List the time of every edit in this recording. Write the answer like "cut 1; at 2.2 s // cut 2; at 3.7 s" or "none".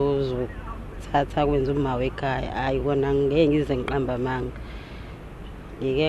none